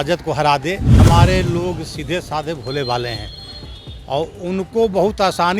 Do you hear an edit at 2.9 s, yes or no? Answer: no